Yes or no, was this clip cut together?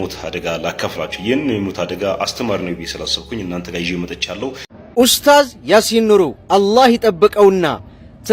yes